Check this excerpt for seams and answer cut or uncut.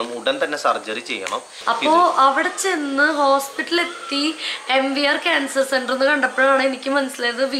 cut